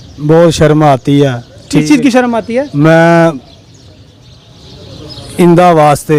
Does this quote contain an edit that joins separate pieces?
no; 0 cuts

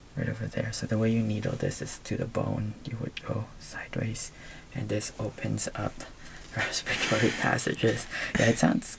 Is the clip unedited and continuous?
yes; 0 cuts

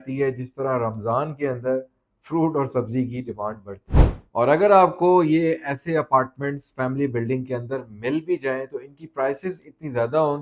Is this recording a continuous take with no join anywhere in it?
yes; 0 cuts

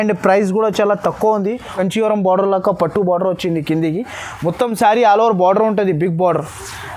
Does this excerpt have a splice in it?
yes; 1 cut; at 1.8 s

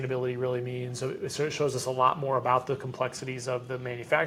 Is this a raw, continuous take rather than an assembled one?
yes; 0 cuts

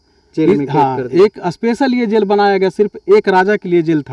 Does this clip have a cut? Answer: no; 0 cuts

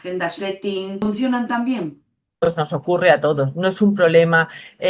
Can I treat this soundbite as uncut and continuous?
no; 2 cuts; at 1.0 s, 2.5 s

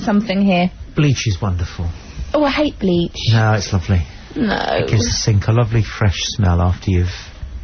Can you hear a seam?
yes; 1 cut; at 1.9 s

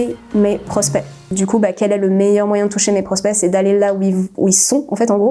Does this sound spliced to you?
yes; 1 cut; at 1.3 s

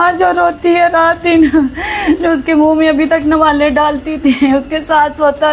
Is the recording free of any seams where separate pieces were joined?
yes; 0 cuts

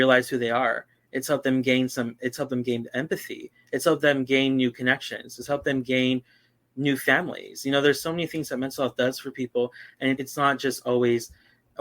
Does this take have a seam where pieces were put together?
yes; 1 cut; at 10.2 s

